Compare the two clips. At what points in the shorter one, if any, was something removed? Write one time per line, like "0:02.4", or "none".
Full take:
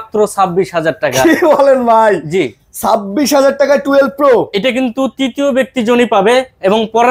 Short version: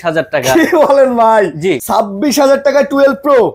0:01.8